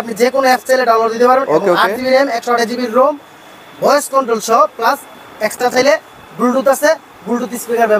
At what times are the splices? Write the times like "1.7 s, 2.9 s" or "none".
none